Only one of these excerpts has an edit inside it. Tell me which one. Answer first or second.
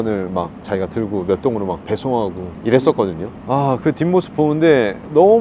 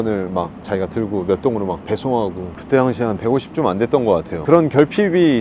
second